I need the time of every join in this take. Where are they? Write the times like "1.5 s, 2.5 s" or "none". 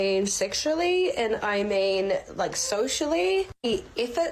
none